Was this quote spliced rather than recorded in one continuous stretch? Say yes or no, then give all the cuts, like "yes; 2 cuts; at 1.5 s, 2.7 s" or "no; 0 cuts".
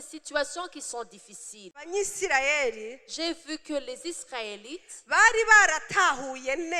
yes; 1 cut; at 1.8 s